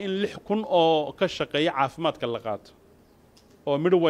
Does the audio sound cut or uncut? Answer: uncut